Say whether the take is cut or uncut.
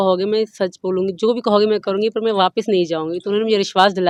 uncut